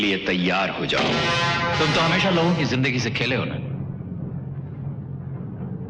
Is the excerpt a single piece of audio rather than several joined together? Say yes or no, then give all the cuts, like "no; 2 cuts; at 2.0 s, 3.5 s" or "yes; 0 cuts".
no; 1 cut; at 1.8 s